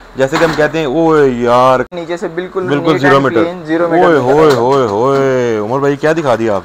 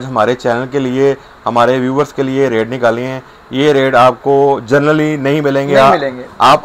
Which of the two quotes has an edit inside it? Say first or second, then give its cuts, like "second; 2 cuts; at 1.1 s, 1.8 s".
first; 1 cut; at 1.9 s